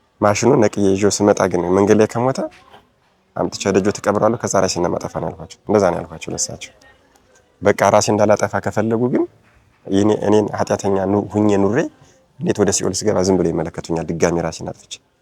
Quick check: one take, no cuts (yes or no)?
yes